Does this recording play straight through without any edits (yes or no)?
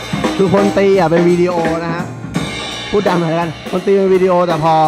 yes